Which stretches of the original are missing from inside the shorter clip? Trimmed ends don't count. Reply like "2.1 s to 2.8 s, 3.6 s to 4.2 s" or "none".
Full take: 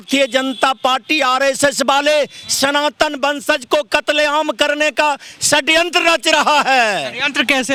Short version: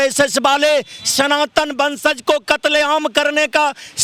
none